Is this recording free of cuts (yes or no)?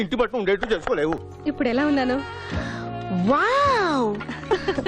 no